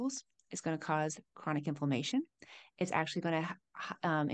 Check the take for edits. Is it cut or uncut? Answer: uncut